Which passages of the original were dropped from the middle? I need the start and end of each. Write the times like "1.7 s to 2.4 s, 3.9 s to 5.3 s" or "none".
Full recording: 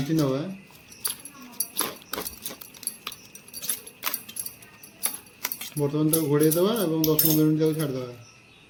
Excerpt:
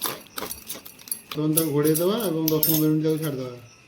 3.1 s to 5.9 s